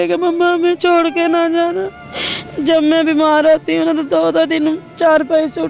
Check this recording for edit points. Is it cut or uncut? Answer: uncut